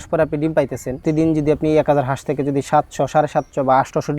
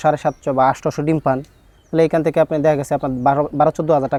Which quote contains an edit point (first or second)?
first